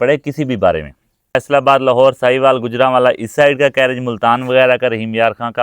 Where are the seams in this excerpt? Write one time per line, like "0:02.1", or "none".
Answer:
0:01.3